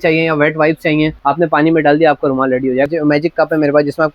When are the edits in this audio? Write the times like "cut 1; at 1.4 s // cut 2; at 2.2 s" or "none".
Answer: cut 1; at 1.2 s // cut 2; at 2.9 s